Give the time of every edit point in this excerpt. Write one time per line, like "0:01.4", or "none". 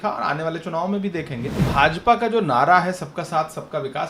0:01.6